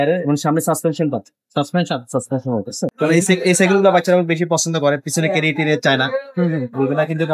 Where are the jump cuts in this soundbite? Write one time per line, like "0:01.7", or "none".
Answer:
0:02.9